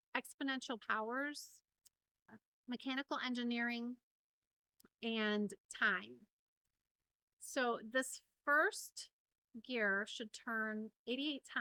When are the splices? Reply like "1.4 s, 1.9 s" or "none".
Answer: none